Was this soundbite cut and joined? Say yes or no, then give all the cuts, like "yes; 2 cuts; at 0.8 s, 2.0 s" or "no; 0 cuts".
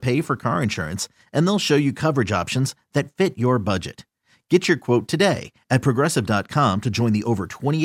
no; 0 cuts